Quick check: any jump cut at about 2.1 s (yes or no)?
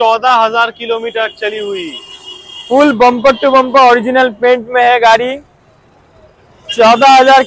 no